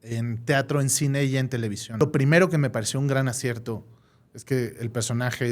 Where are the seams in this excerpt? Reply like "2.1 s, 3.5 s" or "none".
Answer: 2.0 s